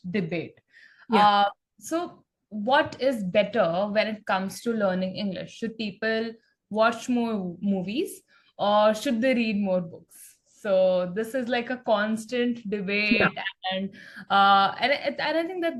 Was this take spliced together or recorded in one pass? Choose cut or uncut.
uncut